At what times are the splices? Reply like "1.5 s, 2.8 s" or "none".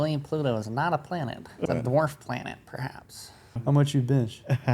1.5 s, 3.6 s